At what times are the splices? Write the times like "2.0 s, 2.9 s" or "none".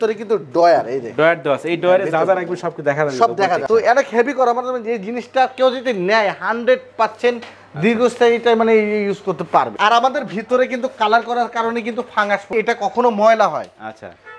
3.6 s, 9.7 s, 12.5 s